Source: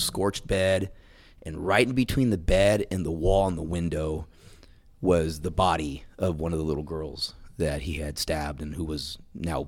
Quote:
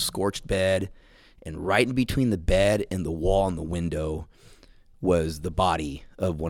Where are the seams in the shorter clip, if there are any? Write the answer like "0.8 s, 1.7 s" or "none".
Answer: none